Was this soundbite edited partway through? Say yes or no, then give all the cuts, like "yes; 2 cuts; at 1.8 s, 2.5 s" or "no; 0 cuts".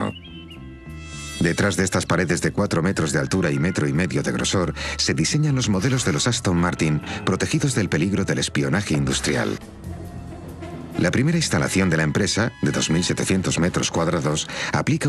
yes; 1 cut; at 5.6 s